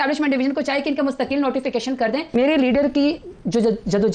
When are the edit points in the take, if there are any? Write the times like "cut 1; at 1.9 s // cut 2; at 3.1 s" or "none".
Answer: cut 1; at 2.3 s